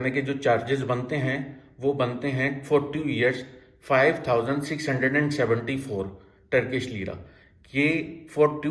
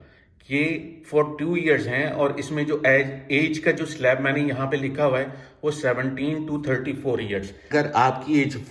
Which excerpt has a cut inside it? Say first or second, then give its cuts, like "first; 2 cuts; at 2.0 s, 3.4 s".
second; 1 cut; at 7.6 s